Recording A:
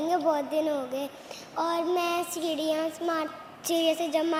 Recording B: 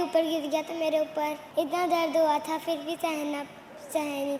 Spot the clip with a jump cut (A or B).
B